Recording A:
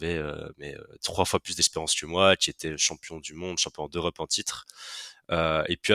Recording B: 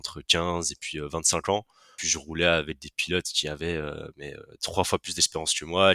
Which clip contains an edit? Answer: B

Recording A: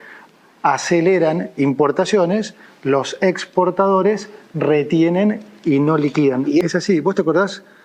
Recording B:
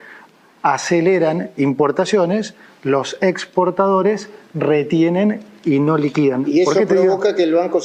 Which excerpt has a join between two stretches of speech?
A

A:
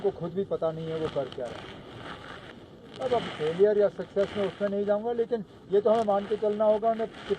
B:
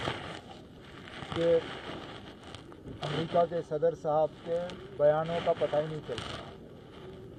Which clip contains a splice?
A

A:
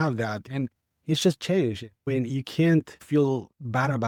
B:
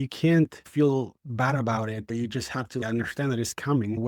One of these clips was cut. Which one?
B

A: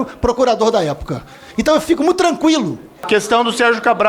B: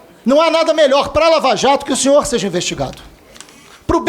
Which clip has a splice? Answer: A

